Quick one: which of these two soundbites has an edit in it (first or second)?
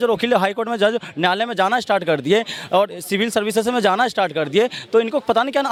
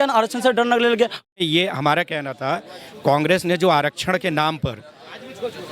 second